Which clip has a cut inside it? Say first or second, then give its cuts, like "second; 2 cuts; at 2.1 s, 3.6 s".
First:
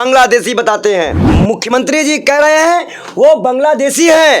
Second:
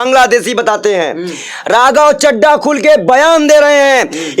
first; 1 cut; at 1.2 s